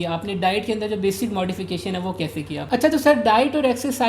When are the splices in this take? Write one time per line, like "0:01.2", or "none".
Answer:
0:02.6